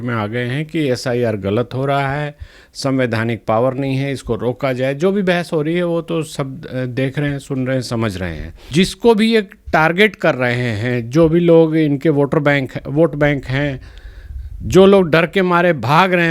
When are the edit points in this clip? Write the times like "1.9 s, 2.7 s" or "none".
8.6 s